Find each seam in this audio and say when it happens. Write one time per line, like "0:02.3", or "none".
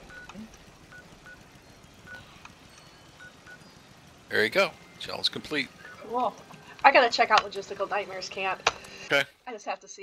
0:09.1